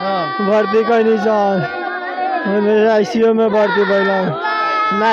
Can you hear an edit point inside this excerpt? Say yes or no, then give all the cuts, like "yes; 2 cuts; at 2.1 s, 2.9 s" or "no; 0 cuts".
no; 0 cuts